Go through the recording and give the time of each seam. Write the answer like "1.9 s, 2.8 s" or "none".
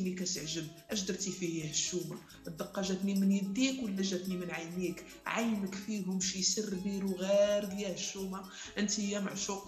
none